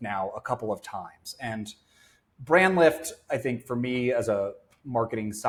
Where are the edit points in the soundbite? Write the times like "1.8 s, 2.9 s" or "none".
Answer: none